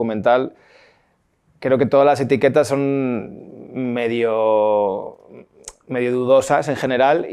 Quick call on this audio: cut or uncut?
uncut